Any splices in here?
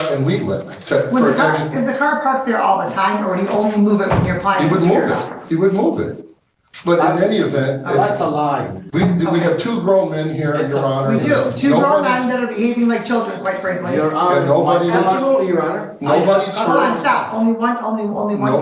no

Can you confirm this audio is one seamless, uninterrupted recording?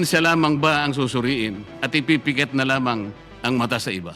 no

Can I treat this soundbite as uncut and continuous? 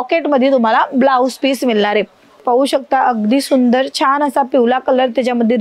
no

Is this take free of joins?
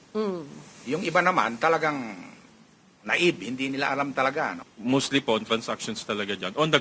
no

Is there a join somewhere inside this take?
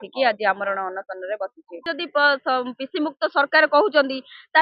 yes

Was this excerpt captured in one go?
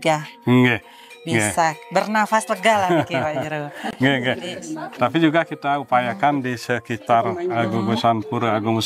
yes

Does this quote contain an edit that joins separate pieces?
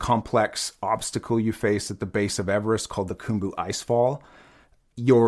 no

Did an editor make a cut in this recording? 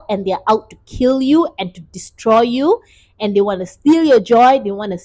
no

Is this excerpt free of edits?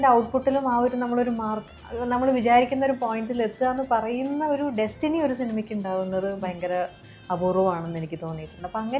yes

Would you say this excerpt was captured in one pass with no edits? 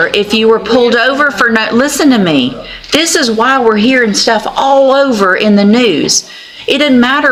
yes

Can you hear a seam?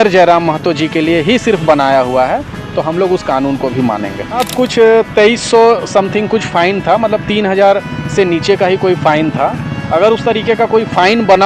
yes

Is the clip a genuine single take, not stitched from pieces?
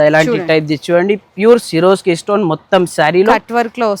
yes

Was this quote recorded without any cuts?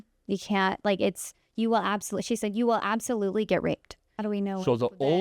no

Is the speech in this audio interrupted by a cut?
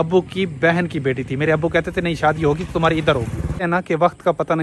yes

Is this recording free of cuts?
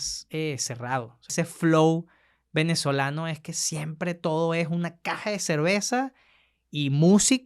no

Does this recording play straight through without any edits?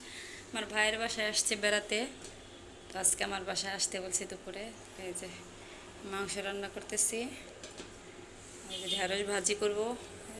yes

